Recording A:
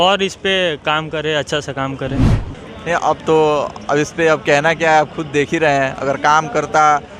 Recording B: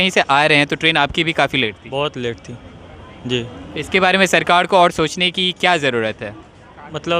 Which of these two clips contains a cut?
A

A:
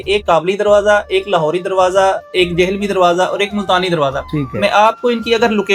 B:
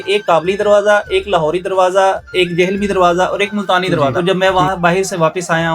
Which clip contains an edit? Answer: B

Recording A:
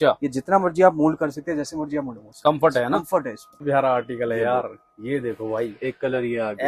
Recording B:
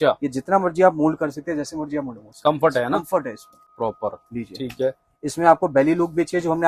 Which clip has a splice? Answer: A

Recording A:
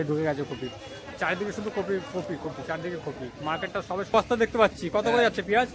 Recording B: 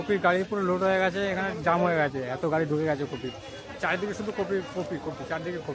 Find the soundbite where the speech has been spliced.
A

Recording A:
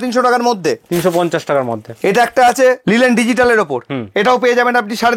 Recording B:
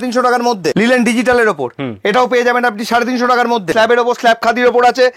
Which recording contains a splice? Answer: B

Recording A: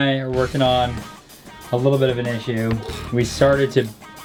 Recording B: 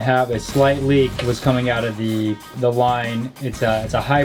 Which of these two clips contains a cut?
B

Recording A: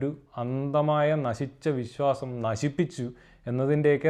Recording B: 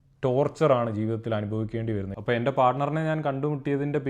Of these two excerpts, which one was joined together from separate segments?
B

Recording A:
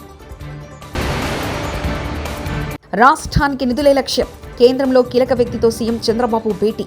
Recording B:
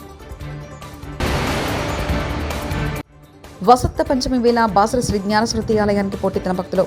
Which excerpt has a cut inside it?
A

